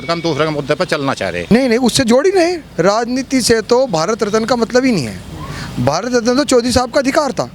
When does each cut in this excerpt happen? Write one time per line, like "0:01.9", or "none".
0:01.5